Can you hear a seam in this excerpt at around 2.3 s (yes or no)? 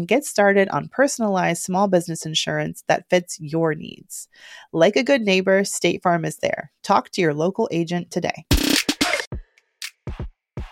no